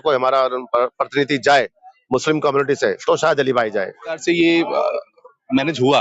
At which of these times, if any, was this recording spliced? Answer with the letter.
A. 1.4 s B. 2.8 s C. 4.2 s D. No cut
C